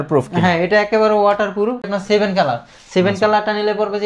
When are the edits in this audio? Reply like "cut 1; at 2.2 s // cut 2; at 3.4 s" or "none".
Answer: cut 1; at 1.9 s